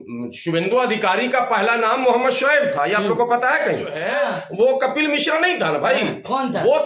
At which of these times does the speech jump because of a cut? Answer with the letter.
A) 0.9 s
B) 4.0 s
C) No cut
B